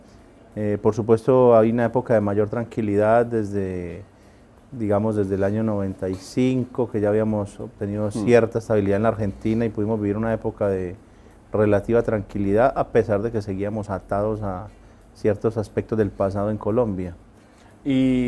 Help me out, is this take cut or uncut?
cut